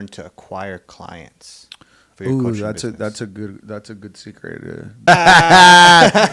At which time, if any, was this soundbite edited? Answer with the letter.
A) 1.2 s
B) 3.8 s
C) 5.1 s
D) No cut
C